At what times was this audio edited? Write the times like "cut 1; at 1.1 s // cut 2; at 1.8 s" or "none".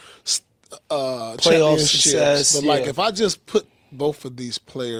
none